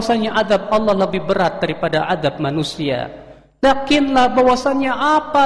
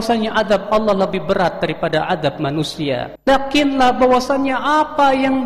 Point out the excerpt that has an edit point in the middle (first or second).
second